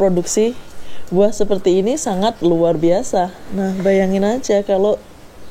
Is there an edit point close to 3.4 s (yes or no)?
yes